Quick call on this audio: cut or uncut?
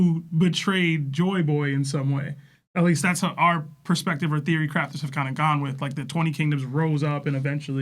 uncut